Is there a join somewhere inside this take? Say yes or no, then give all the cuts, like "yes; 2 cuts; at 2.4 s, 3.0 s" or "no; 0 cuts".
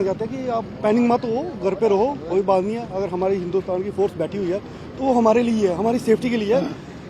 no; 0 cuts